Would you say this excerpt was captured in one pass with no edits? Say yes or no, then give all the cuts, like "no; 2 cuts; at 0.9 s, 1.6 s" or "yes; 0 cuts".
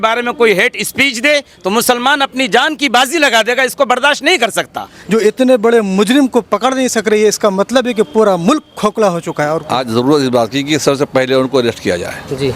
no; 2 cuts; at 4.9 s, 9.6 s